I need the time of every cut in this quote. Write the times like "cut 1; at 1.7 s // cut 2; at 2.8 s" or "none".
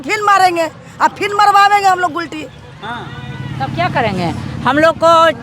none